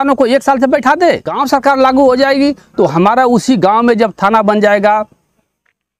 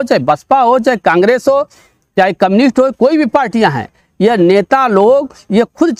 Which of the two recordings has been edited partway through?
first; 1 cut; at 1.3 s

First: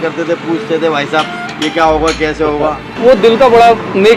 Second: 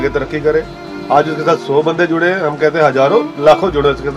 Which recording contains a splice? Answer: first; 1 cut; at 2.9 s

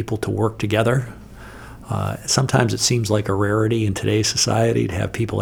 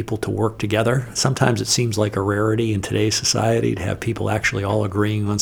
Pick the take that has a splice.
second; 1 cut; at 1.1 s

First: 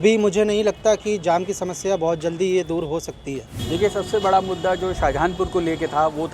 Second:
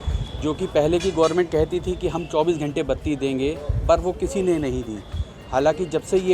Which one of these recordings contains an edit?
first; 1 cut; at 3.5 s

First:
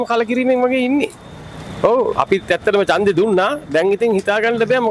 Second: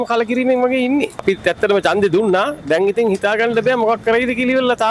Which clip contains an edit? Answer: second; 1 cut; at 1.2 s

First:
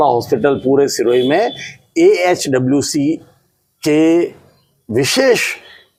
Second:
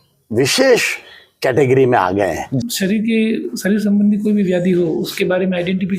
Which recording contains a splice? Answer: second; 1 cut; at 2.6 s

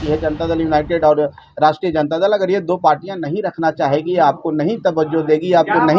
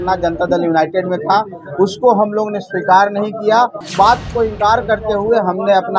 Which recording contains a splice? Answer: second; 1 cut; at 3.8 s

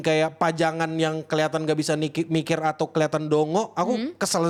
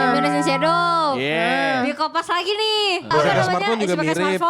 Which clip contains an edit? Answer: second; 1 cut; at 3.1 s

